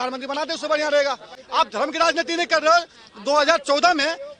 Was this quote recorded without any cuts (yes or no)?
no